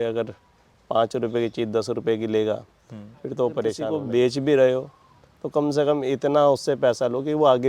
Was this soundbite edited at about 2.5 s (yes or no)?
no